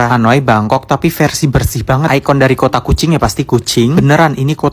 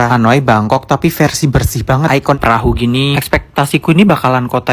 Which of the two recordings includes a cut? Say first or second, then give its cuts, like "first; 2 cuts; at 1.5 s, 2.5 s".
second; 1 cut; at 2.4 s